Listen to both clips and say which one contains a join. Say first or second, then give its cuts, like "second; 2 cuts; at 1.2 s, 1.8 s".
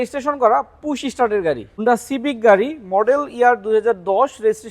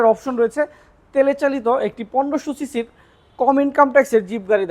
first; 1 cut; at 1.8 s